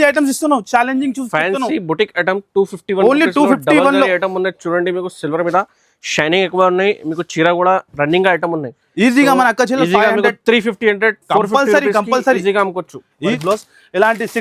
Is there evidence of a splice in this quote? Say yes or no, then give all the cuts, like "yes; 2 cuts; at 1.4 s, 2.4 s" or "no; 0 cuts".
yes; 1 cut; at 13.4 s